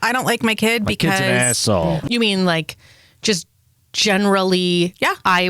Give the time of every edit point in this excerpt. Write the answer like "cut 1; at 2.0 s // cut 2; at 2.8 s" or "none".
cut 1; at 2.0 s